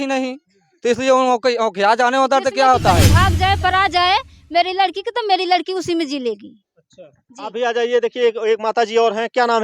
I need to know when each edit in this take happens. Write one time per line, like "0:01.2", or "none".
0:03.1